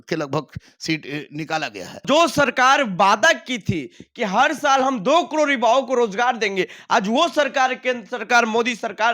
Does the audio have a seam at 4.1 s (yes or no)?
no